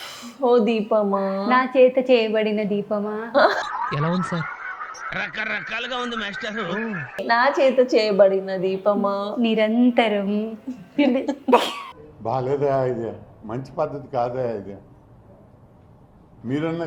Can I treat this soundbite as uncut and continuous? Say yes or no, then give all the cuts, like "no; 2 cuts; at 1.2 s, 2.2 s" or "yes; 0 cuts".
yes; 0 cuts